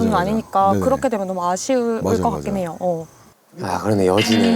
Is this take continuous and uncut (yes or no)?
yes